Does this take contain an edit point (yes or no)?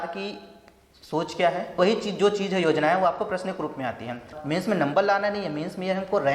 yes